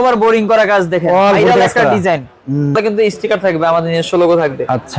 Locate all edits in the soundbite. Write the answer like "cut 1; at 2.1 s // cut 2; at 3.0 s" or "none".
cut 1; at 2.8 s